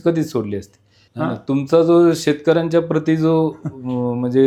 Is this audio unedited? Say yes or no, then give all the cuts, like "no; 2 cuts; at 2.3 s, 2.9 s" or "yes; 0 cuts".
yes; 0 cuts